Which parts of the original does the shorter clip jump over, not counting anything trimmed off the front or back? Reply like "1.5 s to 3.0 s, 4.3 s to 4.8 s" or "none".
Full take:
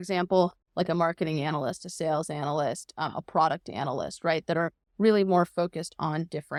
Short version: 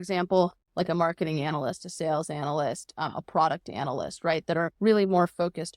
4.7 s to 4.9 s